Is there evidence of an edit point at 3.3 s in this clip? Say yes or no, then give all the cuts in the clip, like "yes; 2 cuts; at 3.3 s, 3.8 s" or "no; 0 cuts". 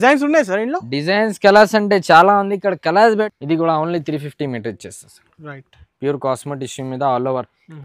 yes; 1 cut; at 3.3 s